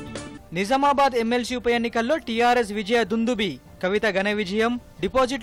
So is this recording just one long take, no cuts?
yes; 0 cuts

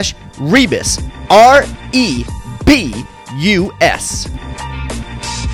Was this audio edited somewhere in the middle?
yes; 1 cut; at 4.0 s

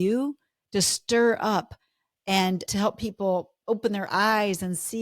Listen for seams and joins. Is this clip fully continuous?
no; 1 cut; at 2.7 s

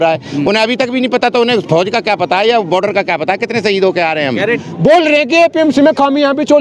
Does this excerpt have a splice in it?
yes; 1 cut; at 4.5 s

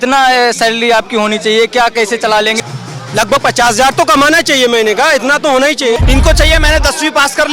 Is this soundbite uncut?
no; 2 cuts; at 2.6 s, 6.0 s

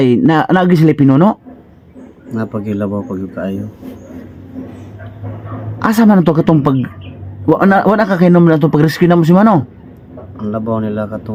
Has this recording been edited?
no; 0 cuts

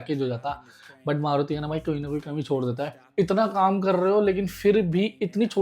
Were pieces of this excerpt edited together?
yes; 1 cut; at 2.9 s

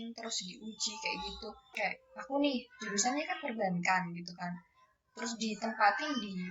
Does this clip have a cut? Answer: yes; 1 cut; at 1.7 s

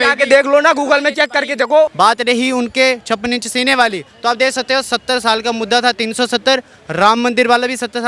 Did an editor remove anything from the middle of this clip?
yes; 1 cut; at 1.9 s

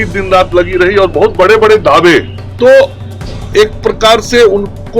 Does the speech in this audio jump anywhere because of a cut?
yes; 1 cut; at 2.4 s

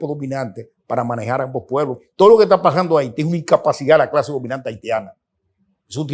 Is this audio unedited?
no; 1 cut; at 2.0 s

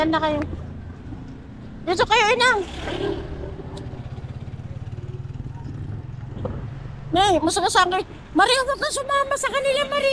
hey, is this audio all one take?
yes; 0 cuts

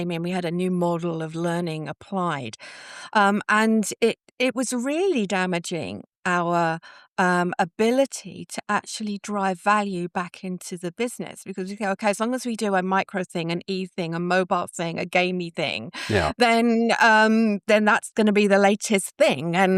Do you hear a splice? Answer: no; 0 cuts

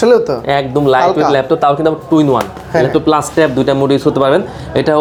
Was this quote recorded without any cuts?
yes; 0 cuts

